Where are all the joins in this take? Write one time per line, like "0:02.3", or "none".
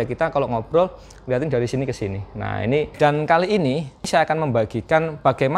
0:02.9